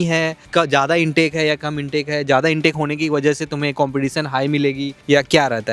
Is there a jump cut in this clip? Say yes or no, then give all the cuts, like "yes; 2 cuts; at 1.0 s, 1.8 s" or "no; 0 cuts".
no; 0 cuts